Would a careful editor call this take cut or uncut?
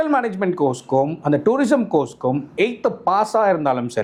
uncut